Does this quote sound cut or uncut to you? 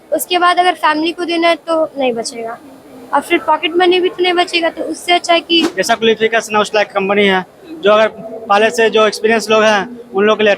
cut